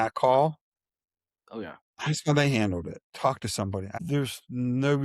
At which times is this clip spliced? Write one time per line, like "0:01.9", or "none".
0:03.1
0:03.9